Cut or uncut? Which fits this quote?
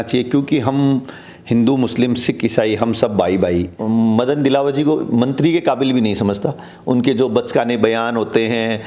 cut